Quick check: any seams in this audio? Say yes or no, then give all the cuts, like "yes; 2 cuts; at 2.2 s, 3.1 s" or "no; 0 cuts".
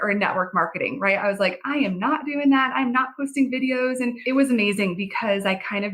yes; 1 cut; at 4.2 s